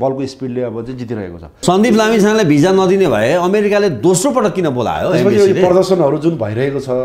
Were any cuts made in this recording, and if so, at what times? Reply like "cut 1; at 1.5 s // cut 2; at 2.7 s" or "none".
cut 1; at 1.6 s